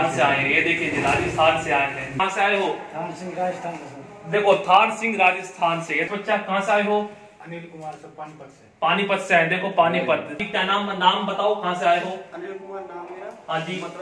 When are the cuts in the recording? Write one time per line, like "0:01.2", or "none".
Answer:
0:02.1
0:06.1
0:10.4